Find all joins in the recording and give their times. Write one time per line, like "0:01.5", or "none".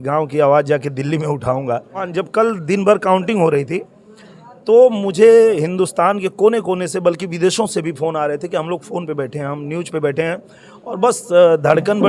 0:02.1